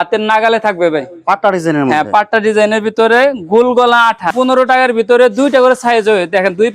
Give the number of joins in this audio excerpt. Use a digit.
1